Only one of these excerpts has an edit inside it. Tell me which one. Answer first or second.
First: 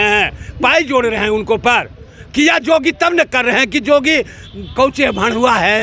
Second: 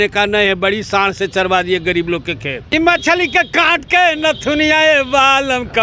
second